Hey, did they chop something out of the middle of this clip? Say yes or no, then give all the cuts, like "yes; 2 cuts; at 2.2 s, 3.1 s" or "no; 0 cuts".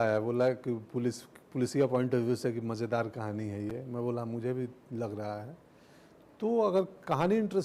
no; 0 cuts